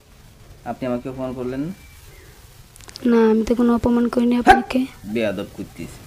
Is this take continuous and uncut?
yes; 0 cuts

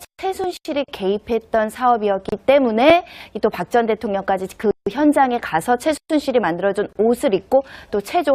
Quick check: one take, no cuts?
no; 1 cut; at 1.3 s

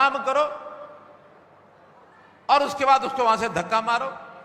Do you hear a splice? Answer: no; 0 cuts

